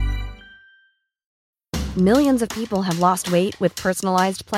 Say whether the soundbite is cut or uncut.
cut